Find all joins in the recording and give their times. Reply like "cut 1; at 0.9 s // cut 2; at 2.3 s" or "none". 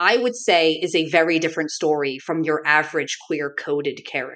none

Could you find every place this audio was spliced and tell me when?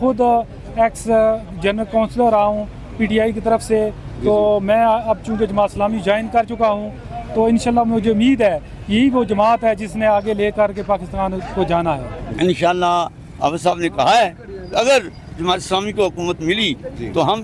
cut 1; at 12.1 s

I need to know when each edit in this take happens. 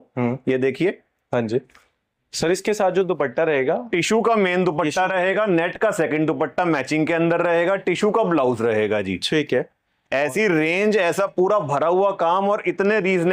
none

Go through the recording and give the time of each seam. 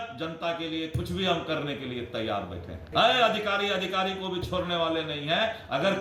cut 1; at 2.9 s

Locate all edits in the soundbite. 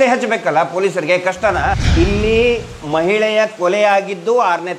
cut 1; at 1.8 s

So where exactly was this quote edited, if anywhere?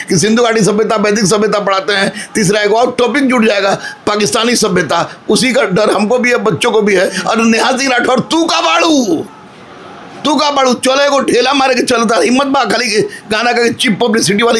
cut 1; at 7.2 s

